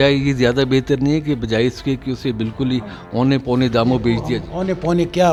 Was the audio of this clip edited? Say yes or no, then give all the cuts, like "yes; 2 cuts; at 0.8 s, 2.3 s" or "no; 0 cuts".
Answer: no; 0 cuts